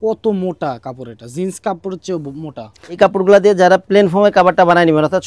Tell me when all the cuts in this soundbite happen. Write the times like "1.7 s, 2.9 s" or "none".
none